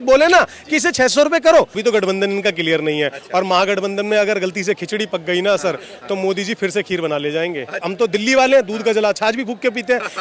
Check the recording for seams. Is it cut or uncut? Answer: cut